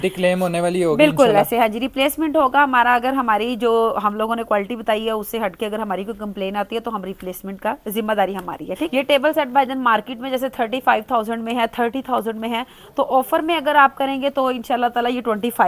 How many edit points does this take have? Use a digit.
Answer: 1